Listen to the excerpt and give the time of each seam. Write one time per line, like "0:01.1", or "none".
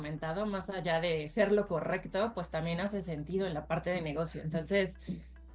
none